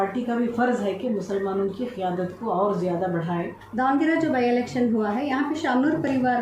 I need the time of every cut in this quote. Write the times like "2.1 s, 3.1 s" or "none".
3.6 s